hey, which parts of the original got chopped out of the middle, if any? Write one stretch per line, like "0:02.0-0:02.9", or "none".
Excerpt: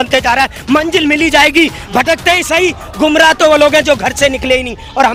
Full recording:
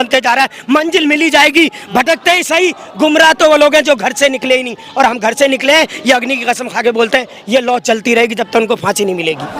none

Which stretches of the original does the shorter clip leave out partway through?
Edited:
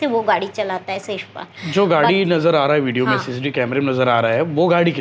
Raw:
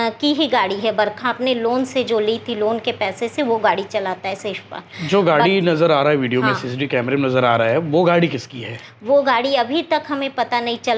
none

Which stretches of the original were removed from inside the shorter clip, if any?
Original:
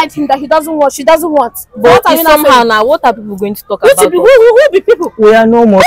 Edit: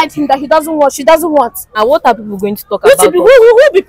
0:01.7-0:02.7

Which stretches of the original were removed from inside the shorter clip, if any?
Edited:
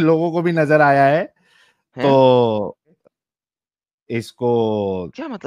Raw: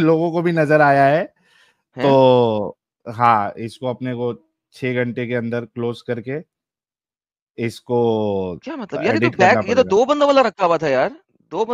0:03.0-0:06.5

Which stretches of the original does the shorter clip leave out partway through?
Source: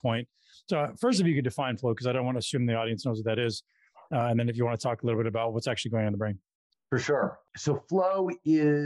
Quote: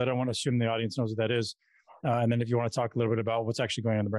none

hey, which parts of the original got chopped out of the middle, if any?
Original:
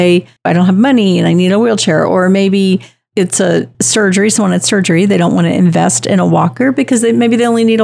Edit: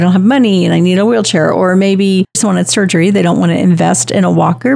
0:02.9-0:04.3

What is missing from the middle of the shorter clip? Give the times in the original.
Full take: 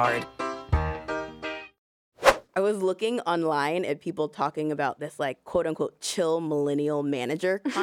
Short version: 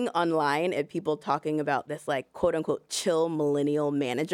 none

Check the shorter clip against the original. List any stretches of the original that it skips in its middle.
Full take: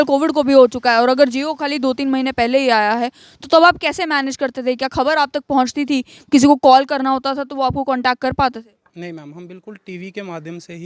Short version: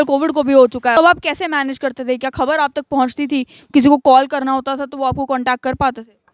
0:01.0-0:03.5

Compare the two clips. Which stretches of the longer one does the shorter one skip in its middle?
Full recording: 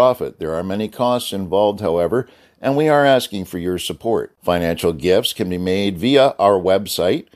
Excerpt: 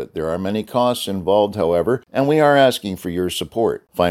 0:02.3-0:02.5

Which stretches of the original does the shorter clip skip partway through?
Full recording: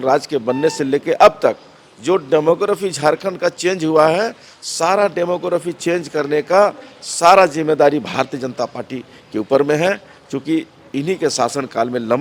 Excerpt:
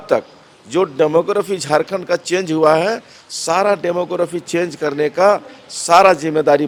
none

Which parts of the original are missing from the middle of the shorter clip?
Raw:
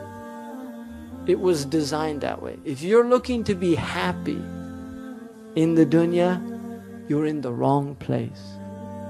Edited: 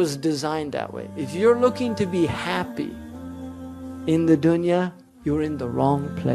0:06.5-0:06.9

